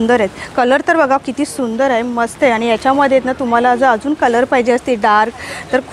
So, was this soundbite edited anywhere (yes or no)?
no